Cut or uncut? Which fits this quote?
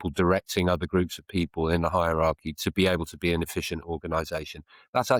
uncut